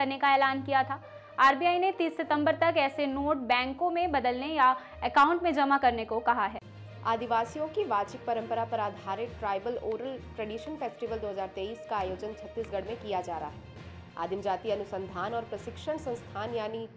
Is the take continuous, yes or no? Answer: no